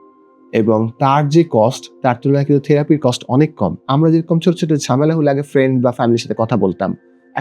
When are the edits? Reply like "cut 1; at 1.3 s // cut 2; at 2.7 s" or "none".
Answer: cut 1; at 3.8 s